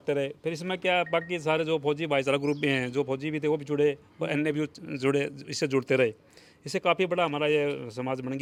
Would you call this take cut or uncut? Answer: uncut